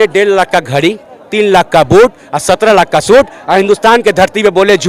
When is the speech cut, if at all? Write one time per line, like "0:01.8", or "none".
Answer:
none